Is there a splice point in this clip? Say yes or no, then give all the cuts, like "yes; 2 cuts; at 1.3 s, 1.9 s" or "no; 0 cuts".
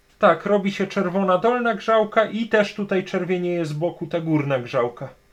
no; 0 cuts